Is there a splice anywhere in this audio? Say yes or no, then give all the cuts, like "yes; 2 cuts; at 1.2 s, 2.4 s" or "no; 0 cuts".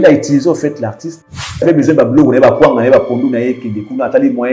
yes; 1 cut; at 1.6 s